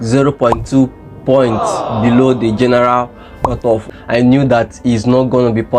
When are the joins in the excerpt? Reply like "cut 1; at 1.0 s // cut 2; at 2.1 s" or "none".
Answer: cut 1; at 3.8 s